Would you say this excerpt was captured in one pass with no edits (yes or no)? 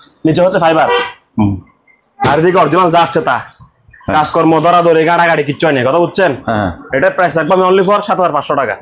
yes